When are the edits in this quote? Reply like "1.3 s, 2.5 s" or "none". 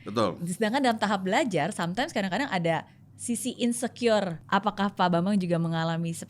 4.4 s